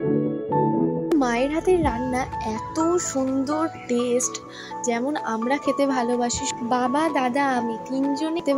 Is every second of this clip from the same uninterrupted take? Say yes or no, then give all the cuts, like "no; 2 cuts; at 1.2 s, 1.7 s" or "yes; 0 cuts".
no; 1 cut; at 1.1 s